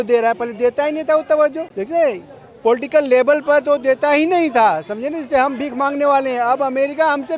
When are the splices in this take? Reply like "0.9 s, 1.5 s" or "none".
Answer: 1.7 s